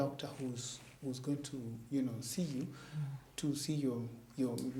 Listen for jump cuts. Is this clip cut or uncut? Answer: uncut